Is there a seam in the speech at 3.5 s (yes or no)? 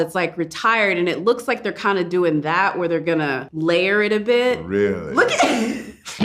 yes